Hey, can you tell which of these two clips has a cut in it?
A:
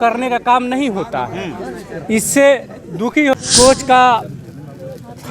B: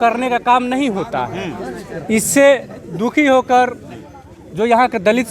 A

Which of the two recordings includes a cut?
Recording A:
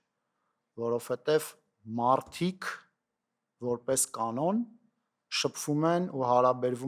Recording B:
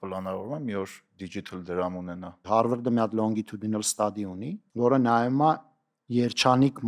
B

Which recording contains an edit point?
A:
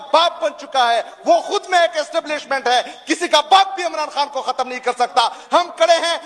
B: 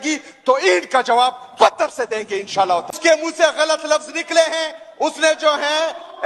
B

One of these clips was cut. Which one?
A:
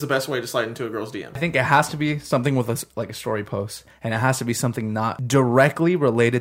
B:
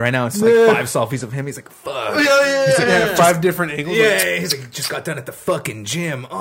A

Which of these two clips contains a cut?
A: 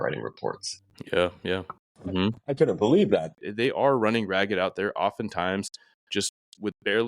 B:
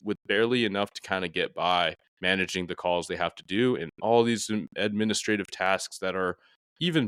A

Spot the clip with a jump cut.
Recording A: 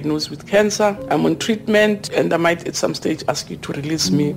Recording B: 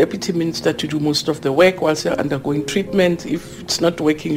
A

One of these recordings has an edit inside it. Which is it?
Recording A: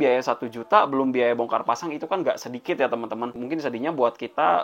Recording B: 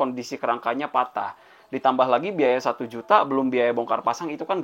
A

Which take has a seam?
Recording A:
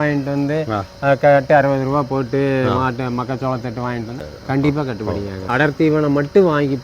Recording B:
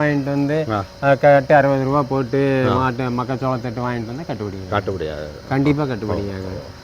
A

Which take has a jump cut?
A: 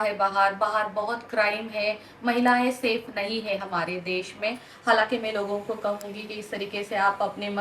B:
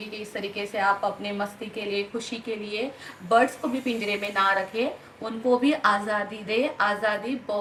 A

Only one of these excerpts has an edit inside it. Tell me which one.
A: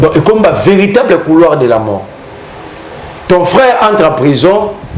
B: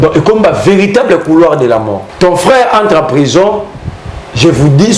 B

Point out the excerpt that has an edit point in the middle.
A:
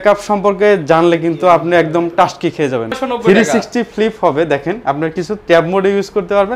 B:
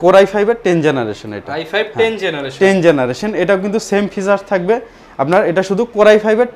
A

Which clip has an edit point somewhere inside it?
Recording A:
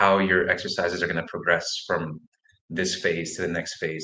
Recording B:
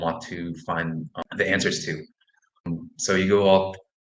B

